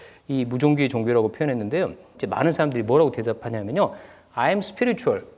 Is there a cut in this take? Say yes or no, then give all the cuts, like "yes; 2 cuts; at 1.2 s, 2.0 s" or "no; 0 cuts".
yes; 1 cut; at 2.2 s